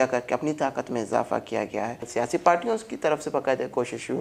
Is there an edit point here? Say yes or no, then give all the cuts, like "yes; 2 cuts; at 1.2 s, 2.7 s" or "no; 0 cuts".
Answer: yes; 1 cut; at 2.1 s